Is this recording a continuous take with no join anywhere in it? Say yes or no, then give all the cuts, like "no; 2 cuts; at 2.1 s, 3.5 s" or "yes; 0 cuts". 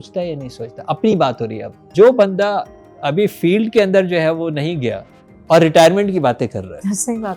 no; 1 cut; at 1.9 s